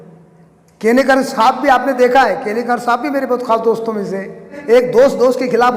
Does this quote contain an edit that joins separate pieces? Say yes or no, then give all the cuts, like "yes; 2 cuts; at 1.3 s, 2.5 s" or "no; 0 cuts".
yes; 1 cut; at 4.5 s